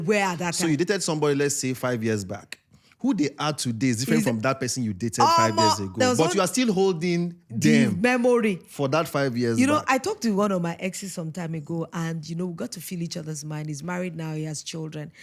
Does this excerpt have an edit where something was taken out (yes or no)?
no